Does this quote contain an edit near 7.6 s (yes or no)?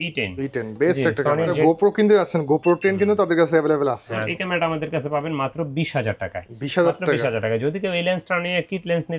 no